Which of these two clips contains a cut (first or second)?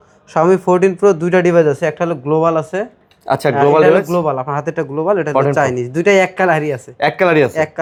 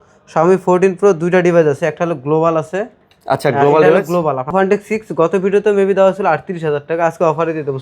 second